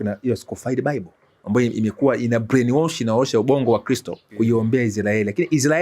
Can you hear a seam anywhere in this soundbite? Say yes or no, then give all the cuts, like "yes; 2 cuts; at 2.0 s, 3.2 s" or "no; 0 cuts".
yes; 1 cut; at 4.2 s